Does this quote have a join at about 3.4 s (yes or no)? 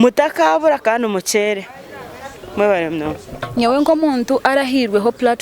yes